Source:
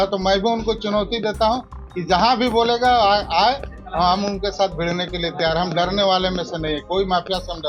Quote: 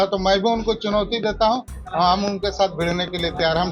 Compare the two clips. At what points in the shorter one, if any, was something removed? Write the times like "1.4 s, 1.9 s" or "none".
1.8 s